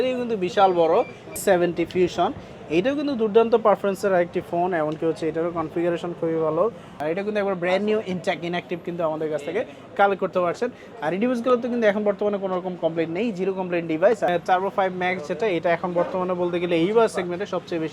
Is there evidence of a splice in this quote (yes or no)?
yes